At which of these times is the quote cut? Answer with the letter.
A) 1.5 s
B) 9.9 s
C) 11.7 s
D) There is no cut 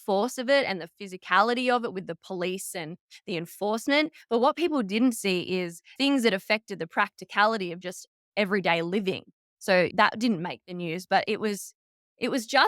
B